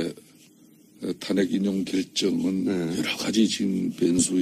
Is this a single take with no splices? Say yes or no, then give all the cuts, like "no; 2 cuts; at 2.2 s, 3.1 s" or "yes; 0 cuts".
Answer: no; 1 cut; at 1.2 s